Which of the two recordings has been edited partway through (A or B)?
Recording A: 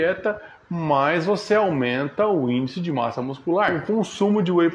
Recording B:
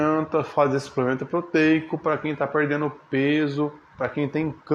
A